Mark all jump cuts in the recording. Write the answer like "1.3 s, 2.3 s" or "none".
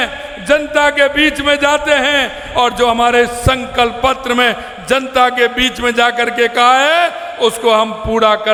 none